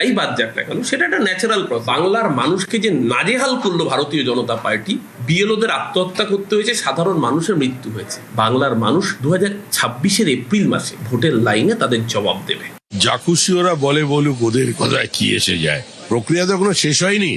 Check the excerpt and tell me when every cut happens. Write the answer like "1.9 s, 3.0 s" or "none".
none